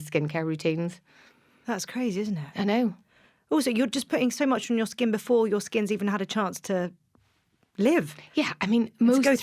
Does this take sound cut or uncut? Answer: uncut